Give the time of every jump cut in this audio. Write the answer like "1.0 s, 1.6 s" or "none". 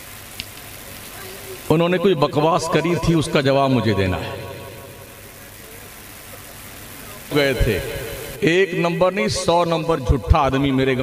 7.3 s